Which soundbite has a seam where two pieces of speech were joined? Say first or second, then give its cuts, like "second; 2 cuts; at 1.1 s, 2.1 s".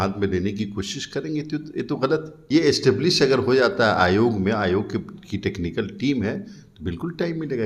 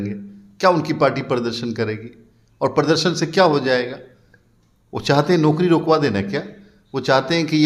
first; 1 cut; at 2.3 s